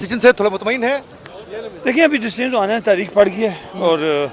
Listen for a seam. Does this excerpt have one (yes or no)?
no